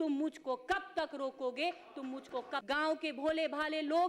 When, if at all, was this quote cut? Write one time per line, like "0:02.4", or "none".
0:02.6